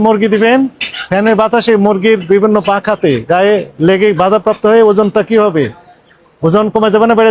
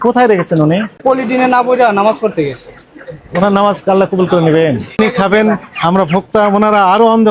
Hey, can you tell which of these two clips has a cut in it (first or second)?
second